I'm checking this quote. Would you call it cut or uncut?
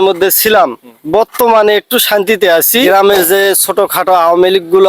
cut